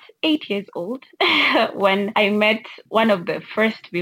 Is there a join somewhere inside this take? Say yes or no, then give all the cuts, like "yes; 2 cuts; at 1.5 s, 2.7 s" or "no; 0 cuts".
yes; 2 cuts; at 1.0 s, 2.1 s